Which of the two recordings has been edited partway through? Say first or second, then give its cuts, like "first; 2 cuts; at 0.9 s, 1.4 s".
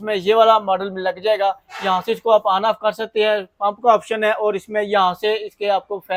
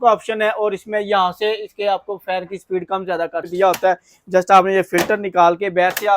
second; 1 cut; at 3.5 s